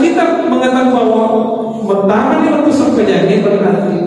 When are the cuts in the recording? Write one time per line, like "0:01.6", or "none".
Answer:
none